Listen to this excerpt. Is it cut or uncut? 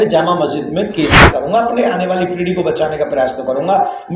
cut